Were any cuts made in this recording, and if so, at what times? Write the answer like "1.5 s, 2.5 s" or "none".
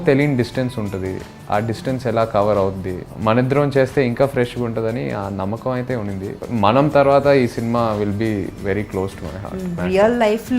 3.1 s, 6.4 s, 9.8 s